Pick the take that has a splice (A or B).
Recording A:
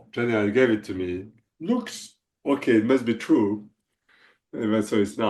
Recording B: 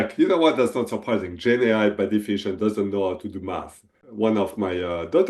B